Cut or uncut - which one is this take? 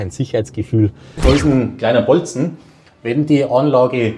cut